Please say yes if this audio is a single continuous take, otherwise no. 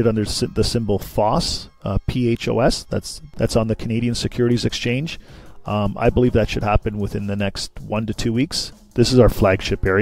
no